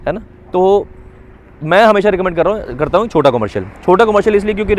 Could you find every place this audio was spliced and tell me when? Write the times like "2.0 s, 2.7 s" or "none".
none